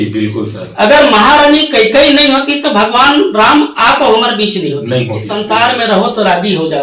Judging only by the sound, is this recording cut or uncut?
cut